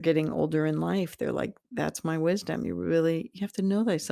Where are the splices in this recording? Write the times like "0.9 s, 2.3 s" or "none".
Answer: none